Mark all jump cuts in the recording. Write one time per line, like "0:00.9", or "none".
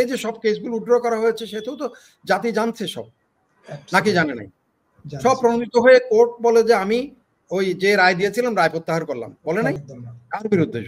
0:09.8